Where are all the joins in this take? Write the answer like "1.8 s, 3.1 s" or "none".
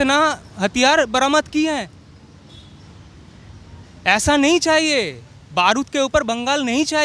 none